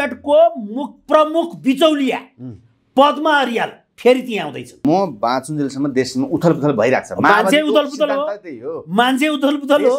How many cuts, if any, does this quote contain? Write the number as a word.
one